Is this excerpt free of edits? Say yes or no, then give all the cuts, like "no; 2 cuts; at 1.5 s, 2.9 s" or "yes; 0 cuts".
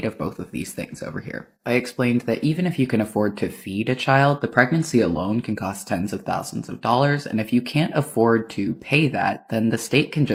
yes; 0 cuts